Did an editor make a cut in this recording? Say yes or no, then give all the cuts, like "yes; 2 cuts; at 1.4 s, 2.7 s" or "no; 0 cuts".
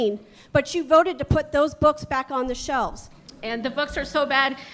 yes; 1 cut; at 3.3 s